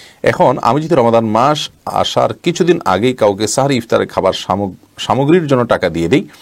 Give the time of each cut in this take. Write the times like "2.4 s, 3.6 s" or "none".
none

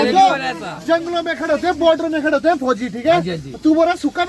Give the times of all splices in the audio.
none

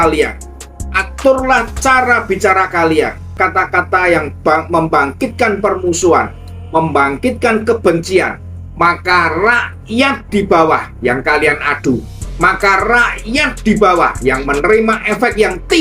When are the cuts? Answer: 3.2 s

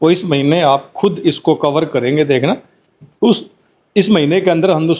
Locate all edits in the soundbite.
none

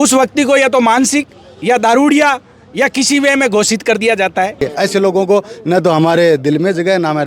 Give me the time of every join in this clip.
4.7 s

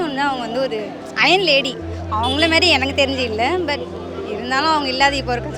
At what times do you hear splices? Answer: none

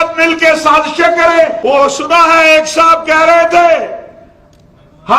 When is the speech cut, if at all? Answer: 1.6 s

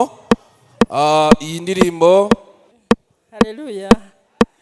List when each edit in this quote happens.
2.7 s

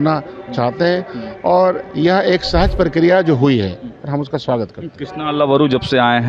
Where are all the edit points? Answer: none

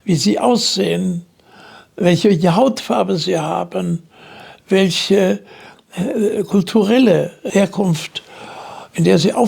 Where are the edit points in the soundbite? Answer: 7.4 s

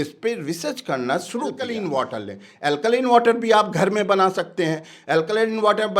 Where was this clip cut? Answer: 1.7 s

